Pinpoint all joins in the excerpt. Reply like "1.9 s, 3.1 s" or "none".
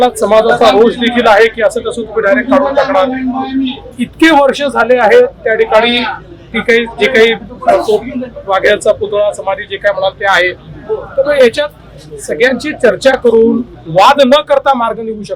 none